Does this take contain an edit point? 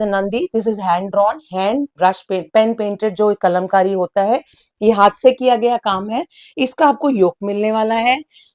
no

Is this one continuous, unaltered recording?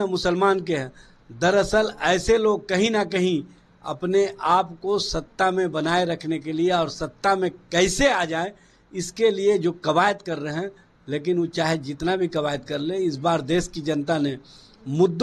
yes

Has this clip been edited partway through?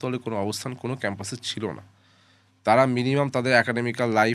no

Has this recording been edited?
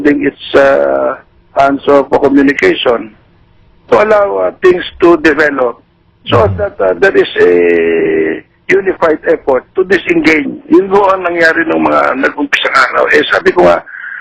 no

